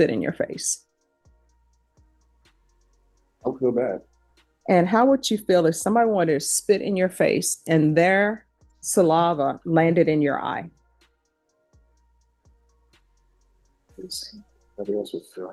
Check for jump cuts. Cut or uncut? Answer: uncut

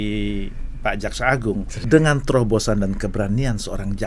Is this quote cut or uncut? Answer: cut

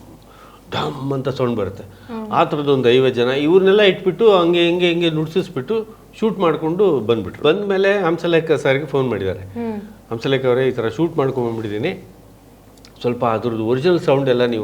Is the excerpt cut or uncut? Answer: cut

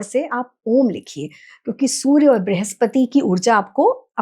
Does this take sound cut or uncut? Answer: uncut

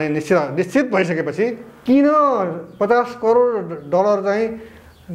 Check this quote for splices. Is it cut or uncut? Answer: cut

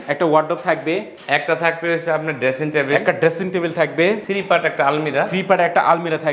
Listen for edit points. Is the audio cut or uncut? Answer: cut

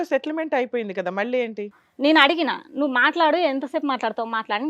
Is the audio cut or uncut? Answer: cut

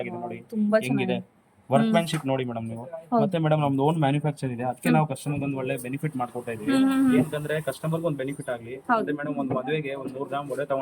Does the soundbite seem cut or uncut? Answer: uncut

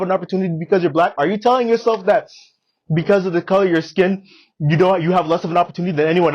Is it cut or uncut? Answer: uncut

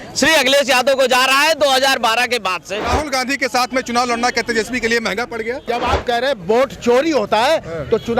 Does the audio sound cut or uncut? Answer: cut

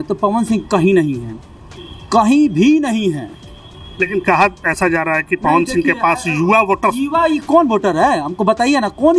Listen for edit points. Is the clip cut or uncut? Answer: uncut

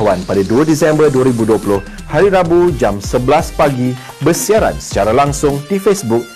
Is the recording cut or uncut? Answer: uncut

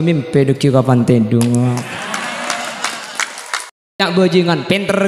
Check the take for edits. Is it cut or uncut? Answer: cut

